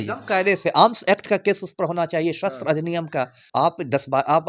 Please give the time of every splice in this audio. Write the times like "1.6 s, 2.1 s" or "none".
3.4 s